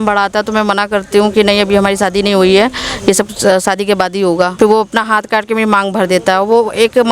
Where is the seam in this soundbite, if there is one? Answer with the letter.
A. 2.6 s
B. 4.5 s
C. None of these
B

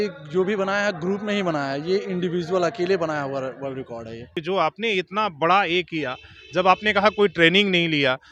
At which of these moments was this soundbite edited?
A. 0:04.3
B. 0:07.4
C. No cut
A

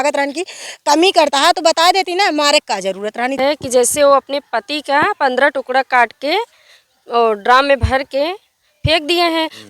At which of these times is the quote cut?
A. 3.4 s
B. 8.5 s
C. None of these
A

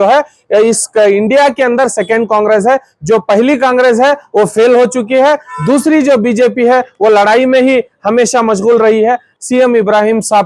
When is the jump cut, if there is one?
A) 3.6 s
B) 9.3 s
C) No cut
B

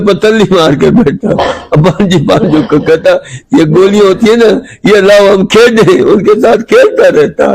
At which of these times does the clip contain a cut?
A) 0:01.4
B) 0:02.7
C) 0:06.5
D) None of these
D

